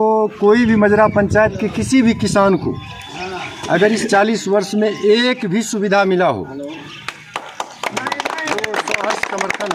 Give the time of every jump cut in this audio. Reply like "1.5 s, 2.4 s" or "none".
none